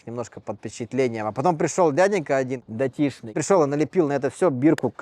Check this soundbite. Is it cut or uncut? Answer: cut